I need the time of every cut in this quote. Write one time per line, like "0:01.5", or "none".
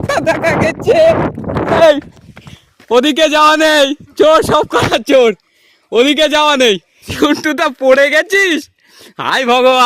0:01.8
0:07.1